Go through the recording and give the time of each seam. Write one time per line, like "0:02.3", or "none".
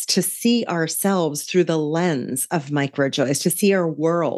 none